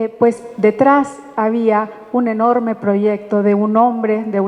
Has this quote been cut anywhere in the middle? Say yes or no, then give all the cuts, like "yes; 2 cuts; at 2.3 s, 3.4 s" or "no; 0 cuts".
no; 0 cuts